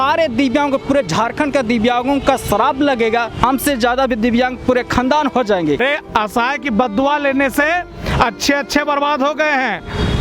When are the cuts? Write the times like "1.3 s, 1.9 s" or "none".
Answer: 3.3 s, 5.8 s